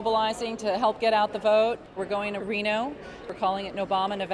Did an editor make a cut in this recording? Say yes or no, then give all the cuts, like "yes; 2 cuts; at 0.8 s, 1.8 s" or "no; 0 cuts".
yes; 1 cut; at 3.3 s